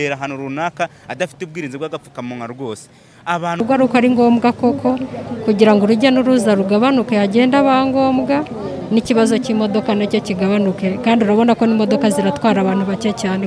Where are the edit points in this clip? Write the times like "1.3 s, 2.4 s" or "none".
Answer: 3.6 s